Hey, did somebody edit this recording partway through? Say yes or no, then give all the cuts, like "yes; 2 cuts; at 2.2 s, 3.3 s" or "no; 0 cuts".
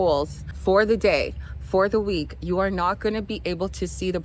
no; 0 cuts